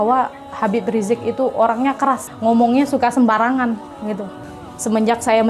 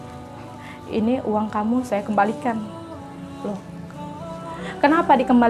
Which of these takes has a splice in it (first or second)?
first